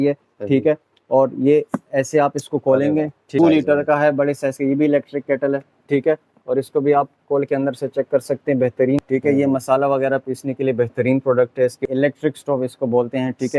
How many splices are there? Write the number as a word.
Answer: three